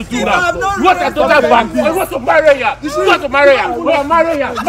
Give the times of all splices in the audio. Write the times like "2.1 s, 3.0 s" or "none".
none